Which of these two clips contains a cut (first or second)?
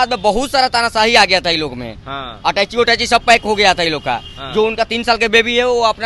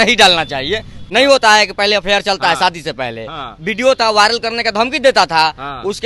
second